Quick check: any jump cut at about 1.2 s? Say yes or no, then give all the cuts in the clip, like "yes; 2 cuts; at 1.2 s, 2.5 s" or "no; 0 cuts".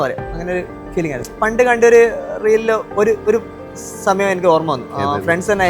yes; 1 cut; at 1.2 s